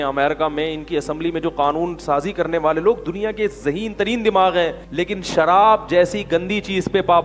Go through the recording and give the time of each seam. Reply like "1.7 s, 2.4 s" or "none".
4.8 s